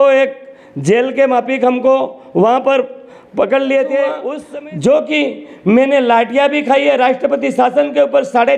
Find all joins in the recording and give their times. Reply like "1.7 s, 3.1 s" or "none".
4.3 s